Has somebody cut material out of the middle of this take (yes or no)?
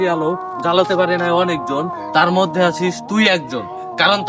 no